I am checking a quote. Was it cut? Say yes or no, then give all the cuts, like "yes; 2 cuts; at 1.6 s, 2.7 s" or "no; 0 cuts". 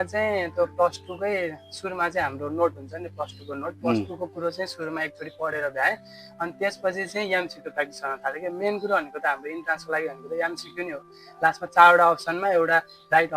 no; 0 cuts